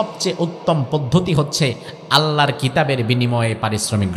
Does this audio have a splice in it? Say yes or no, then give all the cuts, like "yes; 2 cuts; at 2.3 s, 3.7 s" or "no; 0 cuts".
no; 0 cuts